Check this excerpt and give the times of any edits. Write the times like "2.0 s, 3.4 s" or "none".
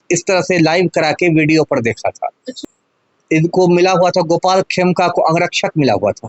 2.5 s